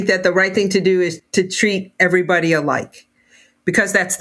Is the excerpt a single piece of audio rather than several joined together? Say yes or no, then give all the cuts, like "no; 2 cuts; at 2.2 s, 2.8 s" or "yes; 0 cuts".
no; 1 cut; at 1.1 s